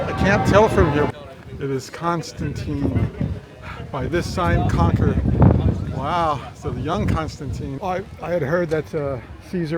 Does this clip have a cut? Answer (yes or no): yes